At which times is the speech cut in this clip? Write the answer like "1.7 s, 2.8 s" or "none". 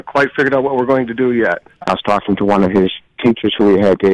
1.7 s